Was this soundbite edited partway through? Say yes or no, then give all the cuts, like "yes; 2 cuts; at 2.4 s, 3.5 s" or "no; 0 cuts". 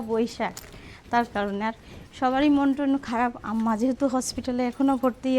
no; 0 cuts